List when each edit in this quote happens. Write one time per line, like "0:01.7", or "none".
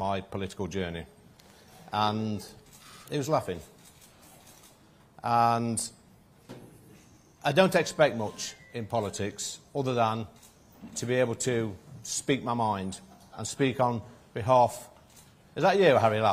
none